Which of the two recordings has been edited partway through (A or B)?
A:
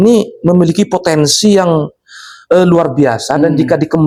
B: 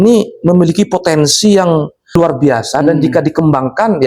B